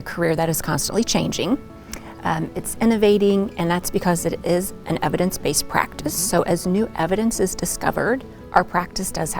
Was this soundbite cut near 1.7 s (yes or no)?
no